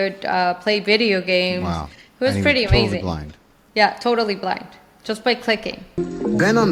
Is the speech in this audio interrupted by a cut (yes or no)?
no